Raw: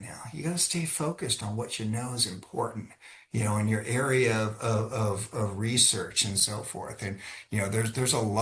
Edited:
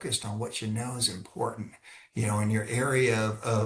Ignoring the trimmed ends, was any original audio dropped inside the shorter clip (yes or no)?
no